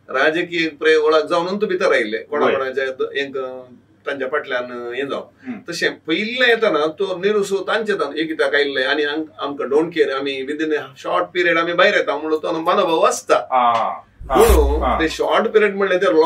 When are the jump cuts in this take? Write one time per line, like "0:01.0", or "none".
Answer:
none

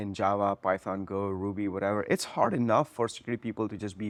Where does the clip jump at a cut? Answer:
none

